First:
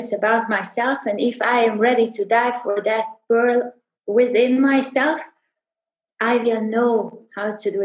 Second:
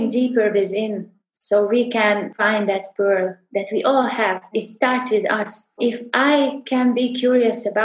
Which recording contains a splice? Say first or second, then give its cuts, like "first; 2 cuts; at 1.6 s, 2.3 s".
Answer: second; 2 cuts; at 4.5 s, 5.8 s